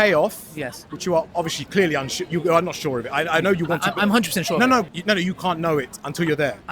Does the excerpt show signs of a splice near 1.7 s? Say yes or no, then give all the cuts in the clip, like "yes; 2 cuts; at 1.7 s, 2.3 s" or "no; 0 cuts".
no; 1 cut; at 4.9 s